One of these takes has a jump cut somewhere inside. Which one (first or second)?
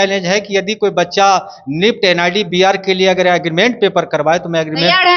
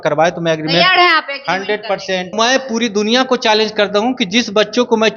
second